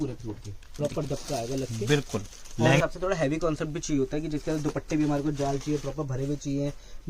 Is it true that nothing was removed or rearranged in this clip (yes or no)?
no